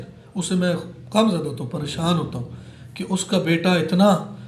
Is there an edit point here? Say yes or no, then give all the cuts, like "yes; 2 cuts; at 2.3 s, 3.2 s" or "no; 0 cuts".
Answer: no; 0 cuts